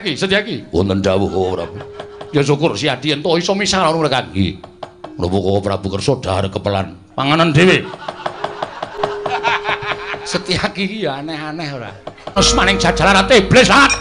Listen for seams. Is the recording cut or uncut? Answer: cut